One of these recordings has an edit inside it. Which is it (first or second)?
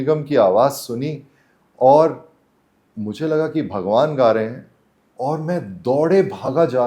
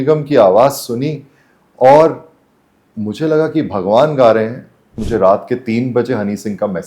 second